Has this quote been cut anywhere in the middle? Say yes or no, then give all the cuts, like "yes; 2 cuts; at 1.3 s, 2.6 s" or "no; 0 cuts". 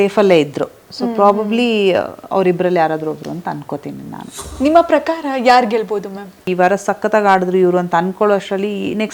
yes; 2 cuts; at 4.4 s, 6.5 s